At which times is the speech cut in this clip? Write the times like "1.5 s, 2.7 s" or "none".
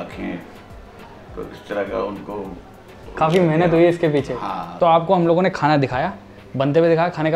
4.6 s